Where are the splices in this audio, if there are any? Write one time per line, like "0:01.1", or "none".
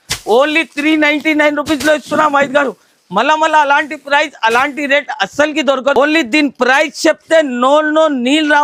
none